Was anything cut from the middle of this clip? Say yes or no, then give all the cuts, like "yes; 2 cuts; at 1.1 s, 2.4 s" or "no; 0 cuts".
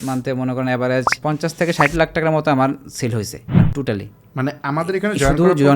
yes; 2 cuts; at 1.1 s, 3.4 s